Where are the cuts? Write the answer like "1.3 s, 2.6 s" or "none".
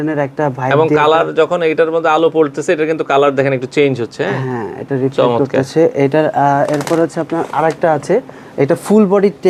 none